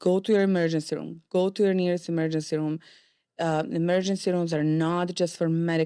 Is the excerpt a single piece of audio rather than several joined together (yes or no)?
yes